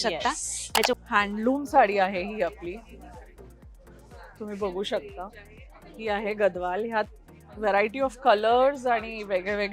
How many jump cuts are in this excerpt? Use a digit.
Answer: 1